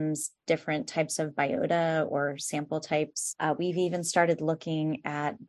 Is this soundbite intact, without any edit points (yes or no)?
yes